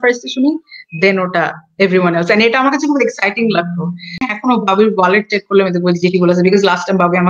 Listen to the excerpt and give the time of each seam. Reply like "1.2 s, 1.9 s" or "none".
4.3 s

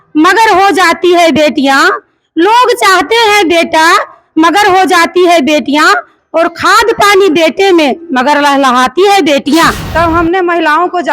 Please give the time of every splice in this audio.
9.8 s

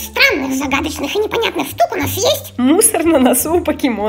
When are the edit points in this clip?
none

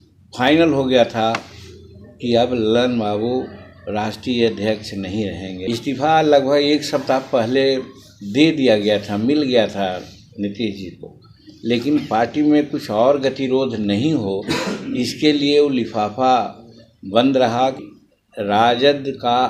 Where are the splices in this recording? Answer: 5.6 s, 18.0 s

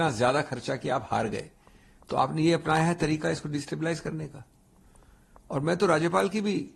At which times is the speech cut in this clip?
none

